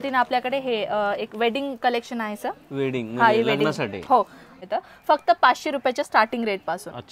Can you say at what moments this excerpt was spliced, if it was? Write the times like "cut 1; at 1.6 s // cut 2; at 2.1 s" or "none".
cut 1; at 4.4 s